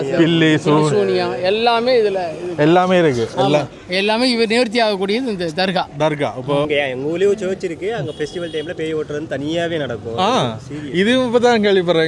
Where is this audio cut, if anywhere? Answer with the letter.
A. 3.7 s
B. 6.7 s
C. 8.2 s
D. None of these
B